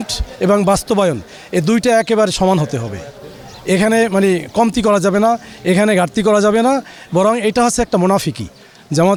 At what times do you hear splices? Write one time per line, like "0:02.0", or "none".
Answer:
none